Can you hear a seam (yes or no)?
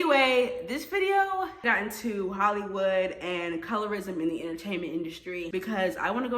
yes